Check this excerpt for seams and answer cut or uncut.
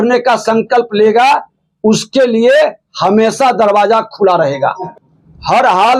cut